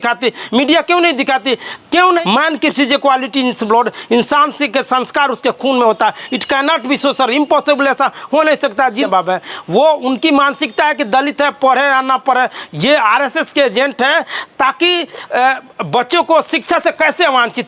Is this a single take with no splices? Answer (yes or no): no